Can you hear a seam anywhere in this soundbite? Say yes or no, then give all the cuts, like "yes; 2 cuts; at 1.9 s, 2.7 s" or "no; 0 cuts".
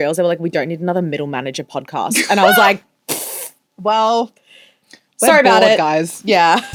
no; 0 cuts